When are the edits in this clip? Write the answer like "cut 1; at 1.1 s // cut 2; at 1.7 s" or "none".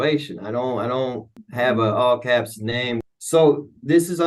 cut 1; at 1.4 s // cut 2; at 3.0 s